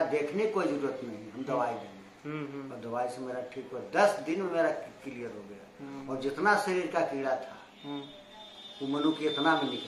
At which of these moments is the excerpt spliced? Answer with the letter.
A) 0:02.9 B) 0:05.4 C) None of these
C